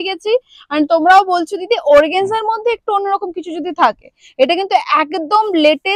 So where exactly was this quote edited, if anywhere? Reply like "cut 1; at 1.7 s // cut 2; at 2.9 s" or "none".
none